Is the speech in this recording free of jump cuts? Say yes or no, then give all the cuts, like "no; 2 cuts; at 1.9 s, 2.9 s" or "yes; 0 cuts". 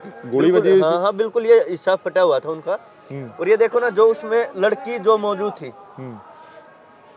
yes; 0 cuts